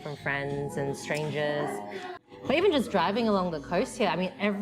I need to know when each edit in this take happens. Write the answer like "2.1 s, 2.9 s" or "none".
2.2 s